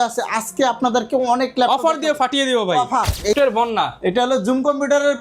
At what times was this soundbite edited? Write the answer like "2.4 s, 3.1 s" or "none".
3.4 s